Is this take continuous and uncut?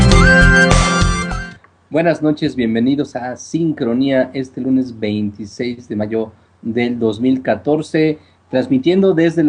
no; 1 cut; at 6.4 s

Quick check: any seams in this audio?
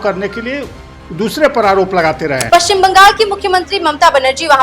yes; 1 cut; at 2.4 s

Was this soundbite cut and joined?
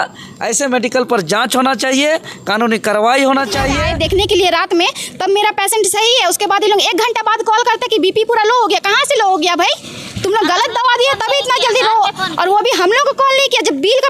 yes; 1 cut; at 3.8 s

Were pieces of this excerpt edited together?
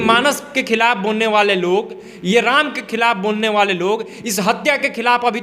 no; 0 cuts

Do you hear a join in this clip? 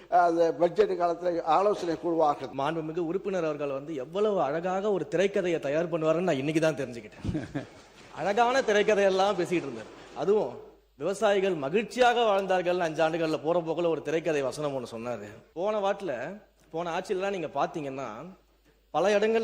yes; 1 cut; at 2.5 s

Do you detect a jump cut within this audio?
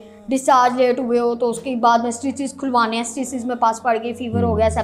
no; 0 cuts

